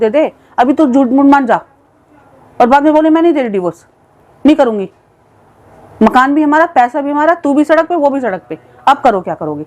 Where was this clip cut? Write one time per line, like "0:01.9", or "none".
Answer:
none

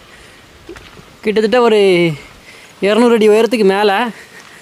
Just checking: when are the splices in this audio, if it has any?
none

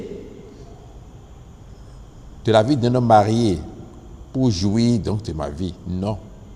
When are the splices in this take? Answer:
none

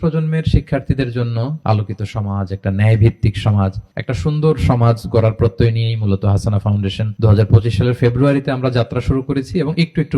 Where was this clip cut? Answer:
0:01.6
0:07.1

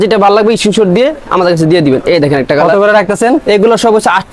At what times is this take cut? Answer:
none

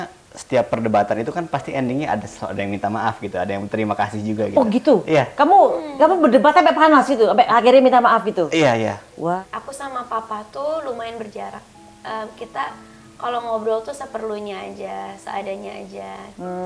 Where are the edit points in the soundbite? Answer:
0:09.4

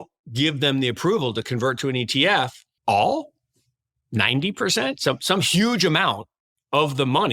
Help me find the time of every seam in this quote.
0:02.6

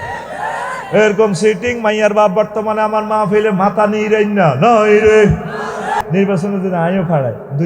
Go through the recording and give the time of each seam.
0:06.0

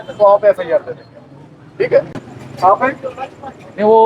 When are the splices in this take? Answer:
0:02.2

